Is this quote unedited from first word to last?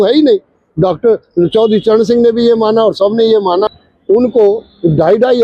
no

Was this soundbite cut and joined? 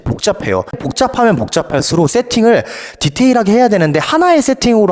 no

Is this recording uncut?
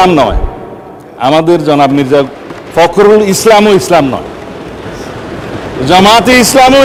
yes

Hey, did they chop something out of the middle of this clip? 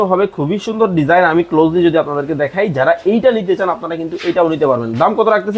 no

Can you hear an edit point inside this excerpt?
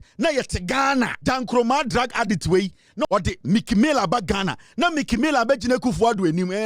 yes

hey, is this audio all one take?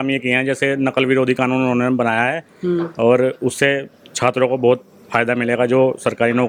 yes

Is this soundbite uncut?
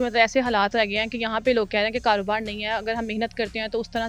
yes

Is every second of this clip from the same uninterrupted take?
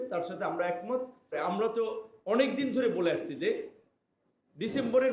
no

